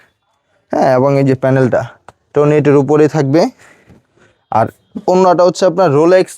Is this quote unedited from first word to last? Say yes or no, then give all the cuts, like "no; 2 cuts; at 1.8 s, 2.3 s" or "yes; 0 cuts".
yes; 0 cuts